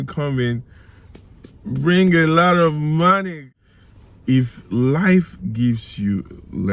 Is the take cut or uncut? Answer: cut